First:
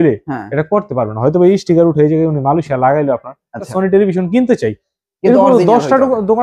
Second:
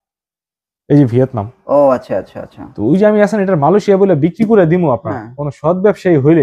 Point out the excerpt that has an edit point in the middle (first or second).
first